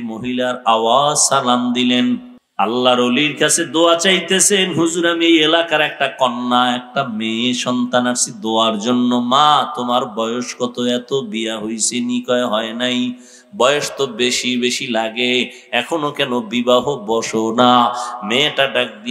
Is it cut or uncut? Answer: cut